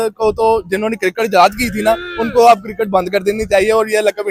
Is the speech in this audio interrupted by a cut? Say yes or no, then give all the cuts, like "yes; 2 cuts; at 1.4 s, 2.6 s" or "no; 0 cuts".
no; 0 cuts